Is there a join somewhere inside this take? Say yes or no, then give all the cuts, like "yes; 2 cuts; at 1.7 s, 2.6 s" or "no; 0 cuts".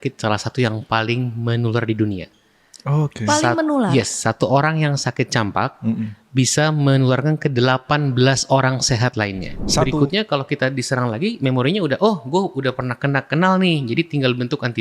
yes; 1 cut; at 9.9 s